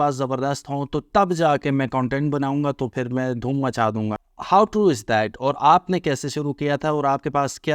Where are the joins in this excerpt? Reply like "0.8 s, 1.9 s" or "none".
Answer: 4.3 s